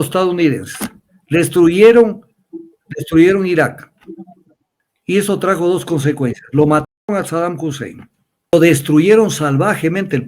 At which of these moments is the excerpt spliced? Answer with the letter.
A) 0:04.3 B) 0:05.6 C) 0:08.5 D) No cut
C